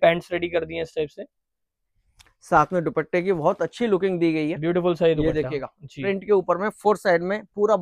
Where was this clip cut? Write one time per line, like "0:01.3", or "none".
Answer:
none